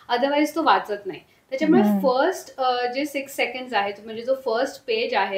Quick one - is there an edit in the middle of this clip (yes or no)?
no